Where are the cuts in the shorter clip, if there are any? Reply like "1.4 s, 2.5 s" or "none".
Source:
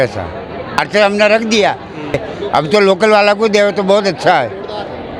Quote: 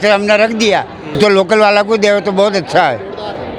1.1 s